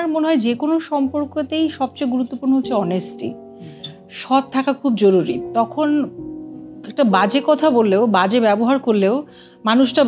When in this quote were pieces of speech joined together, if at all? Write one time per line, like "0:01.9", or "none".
none